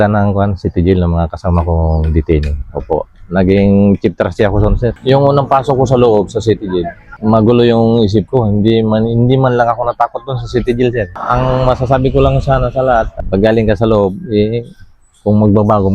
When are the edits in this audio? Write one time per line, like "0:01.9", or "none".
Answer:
0:05.0
0:11.2